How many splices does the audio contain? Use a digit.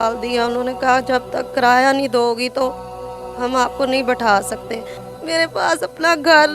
1